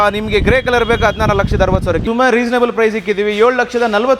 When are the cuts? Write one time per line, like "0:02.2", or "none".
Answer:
0:02.0